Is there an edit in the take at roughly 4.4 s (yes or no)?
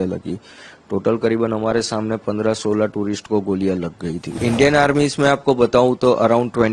yes